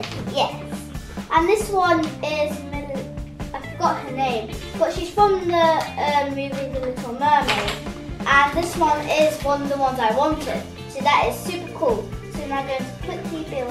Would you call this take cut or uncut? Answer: uncut